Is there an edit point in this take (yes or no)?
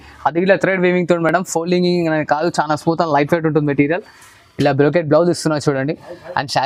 no